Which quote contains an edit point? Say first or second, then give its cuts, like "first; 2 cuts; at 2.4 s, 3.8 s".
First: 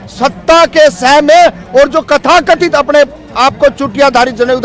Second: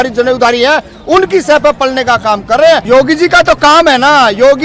second; 1 cut; at 2.8 s